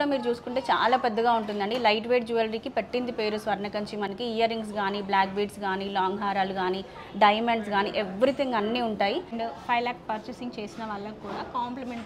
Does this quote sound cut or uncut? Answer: cut